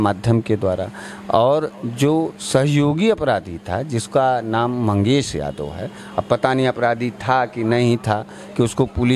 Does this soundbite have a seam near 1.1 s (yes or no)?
no